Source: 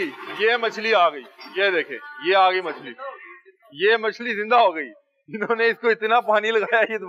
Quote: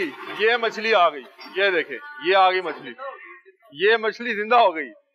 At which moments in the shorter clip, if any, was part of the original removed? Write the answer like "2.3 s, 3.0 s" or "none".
none